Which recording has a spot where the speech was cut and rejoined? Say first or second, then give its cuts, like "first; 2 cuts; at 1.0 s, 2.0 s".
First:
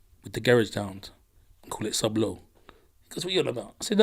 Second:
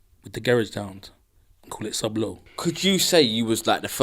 second; 1 cut; at 2.5 s